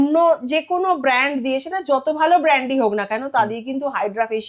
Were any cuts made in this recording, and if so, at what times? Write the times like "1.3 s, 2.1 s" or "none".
none